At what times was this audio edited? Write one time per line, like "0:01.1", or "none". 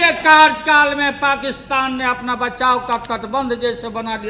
none